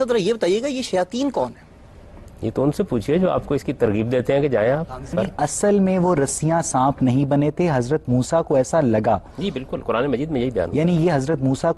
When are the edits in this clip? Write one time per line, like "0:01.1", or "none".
0:05.1